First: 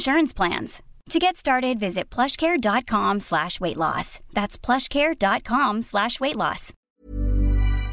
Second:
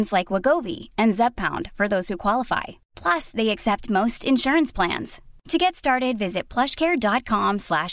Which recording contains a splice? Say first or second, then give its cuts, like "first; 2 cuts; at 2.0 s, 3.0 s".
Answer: first; 1 cut; at 6.9 s